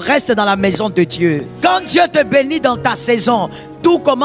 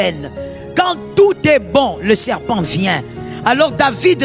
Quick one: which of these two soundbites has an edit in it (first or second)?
first